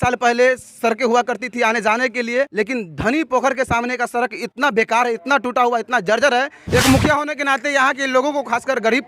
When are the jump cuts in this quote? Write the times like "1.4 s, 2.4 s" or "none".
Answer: 2.5 s, 6.5 s